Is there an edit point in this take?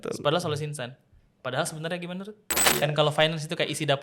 yes; 1 cut; at 2.6 s

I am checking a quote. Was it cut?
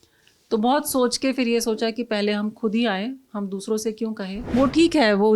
yes; 1 cut; at 4.5 s

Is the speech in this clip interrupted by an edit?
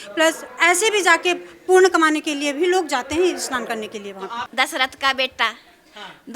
yes; 1 cut; at 4.4 s

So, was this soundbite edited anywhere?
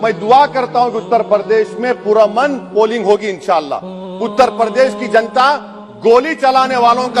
no; 0 cuts

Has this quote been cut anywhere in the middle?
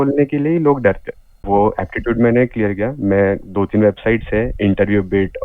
yes; 1 cut; at 1.4 s

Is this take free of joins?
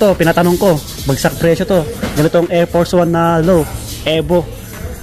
yes; 0 cuts

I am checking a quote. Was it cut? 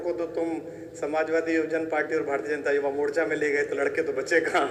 no; 0 cuts

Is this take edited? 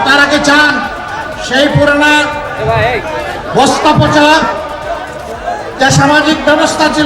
no; 0 cuts

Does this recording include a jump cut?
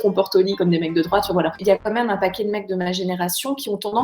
yes; 1 cut; at 1.6 s

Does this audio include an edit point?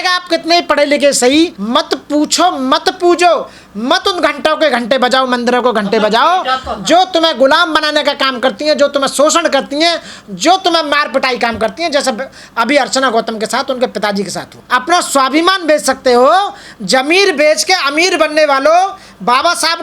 yes; 2 cuts; at 1.6 s, 14.5 s

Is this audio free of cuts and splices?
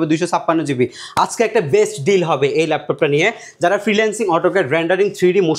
yes; 0 cuts

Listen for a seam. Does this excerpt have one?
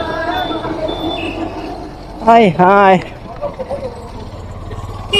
no; 0 cuts

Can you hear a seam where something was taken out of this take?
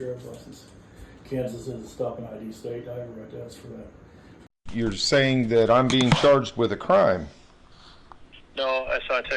yes; 1 cut; at 4.7 s

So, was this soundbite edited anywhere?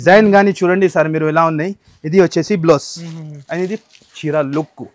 no; 0 cuts

